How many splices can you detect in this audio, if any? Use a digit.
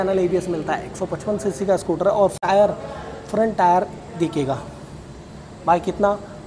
1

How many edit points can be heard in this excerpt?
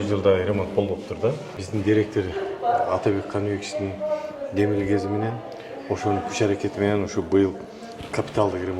1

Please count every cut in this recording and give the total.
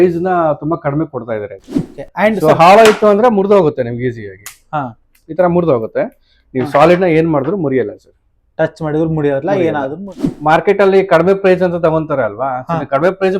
2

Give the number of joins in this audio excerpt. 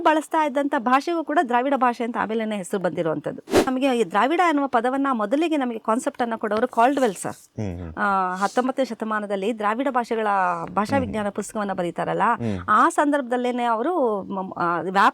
1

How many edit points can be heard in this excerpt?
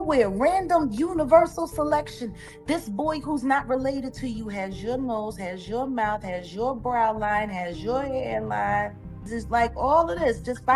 1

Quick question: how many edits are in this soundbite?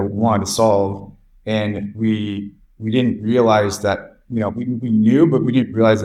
0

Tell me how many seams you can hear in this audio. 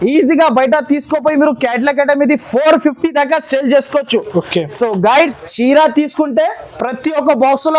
1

